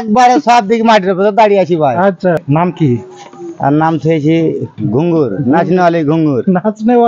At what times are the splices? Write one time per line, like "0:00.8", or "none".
0:02.4